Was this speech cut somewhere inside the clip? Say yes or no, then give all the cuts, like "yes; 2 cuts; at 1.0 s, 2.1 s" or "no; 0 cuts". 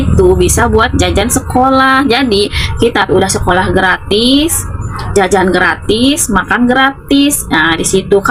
no; 0 cuts